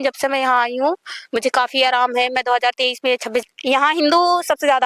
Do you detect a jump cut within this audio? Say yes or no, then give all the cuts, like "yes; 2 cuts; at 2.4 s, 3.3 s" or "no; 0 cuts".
yes; 1 cut; at 3.4 s